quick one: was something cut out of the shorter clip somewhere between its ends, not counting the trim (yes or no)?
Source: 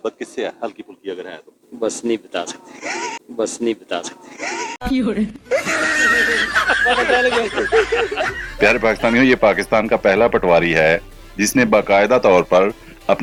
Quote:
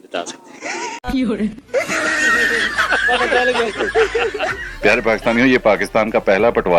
yes